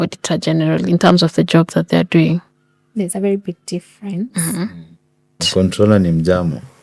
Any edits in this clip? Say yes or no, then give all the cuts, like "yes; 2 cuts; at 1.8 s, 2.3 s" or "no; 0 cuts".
yes; 1 cut; at 5.4 s